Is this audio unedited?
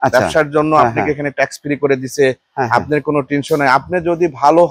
yes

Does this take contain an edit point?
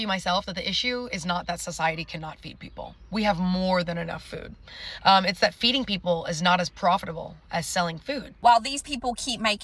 yes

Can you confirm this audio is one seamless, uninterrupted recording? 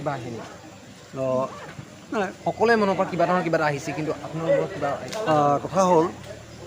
yes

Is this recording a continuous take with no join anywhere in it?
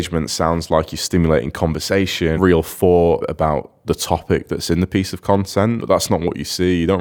no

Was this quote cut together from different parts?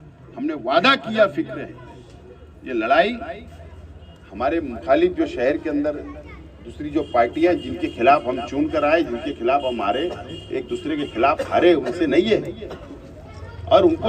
no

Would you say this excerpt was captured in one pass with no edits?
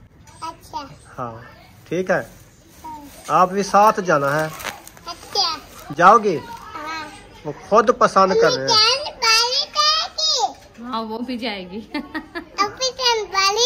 yes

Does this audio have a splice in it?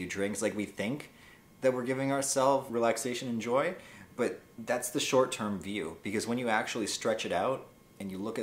yes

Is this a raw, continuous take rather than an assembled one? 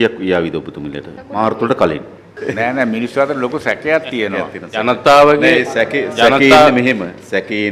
no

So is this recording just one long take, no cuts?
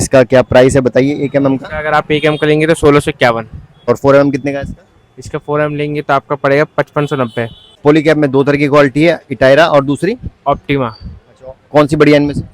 no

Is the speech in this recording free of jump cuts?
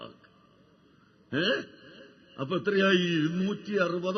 no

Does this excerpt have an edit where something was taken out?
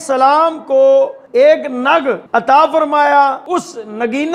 yes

